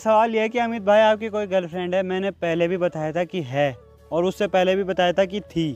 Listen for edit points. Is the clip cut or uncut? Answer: uncut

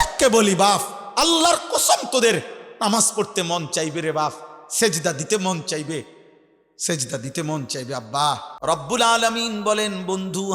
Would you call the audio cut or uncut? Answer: cut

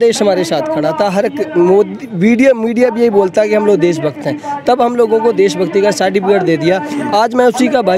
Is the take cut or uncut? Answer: uncut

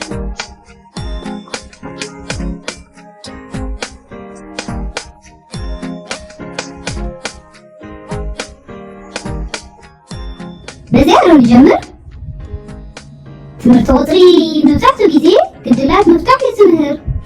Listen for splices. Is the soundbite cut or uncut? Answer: cut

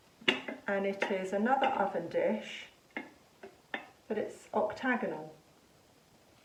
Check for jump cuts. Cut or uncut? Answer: uncut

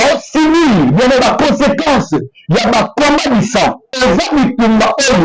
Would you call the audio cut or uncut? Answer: cut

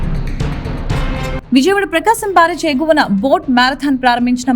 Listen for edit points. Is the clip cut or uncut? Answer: cut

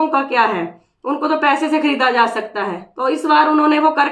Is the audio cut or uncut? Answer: uncut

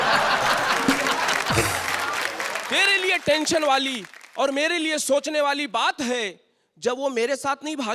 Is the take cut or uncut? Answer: uncut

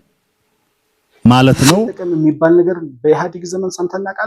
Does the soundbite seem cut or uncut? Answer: cut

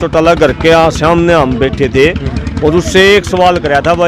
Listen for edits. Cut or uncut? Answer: uncut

